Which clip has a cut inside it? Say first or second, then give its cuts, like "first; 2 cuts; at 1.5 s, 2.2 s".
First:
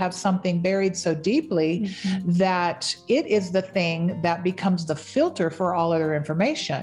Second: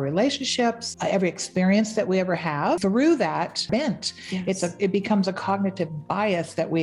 second; 3 cuts; at 0.9 s, 2.8 s, 3.6 s